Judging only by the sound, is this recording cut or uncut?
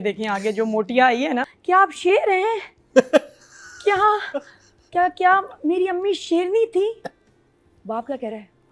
cut